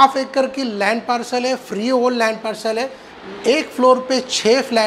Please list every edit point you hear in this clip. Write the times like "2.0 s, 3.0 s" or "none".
3.2 s

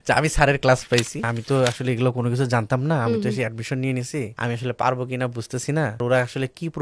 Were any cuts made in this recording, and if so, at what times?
1.2 s, 4.3 s, 6.0 s

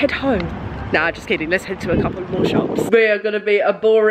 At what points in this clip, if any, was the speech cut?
2.8 s

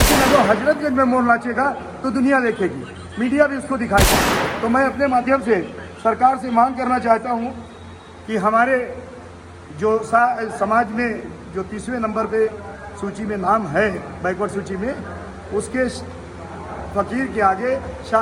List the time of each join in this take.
none

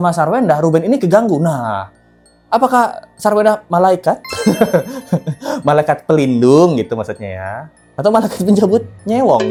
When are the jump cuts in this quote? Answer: none

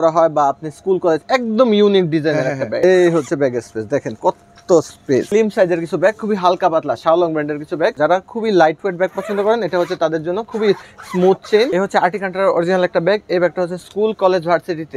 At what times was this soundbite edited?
2.7 s, 5.3 s, 8.0 s, 11.7 s

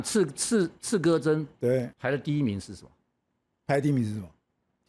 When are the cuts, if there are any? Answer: 1.9 s

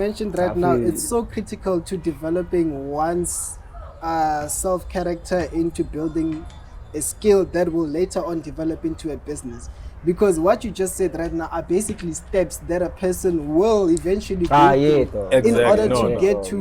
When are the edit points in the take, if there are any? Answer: none

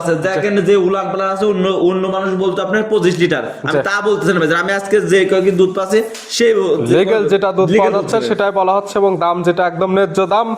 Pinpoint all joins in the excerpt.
none

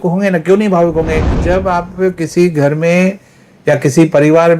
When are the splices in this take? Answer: 1.4 s

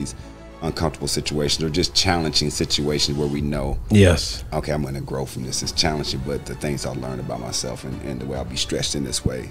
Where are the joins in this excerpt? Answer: none

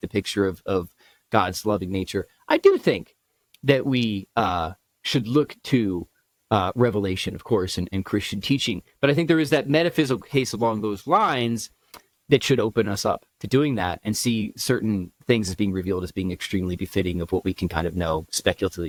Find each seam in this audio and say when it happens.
none

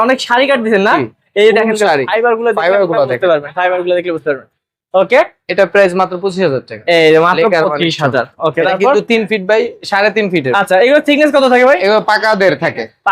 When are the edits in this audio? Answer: none

